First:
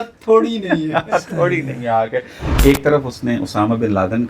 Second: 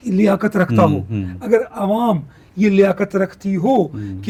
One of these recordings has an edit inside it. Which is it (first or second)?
first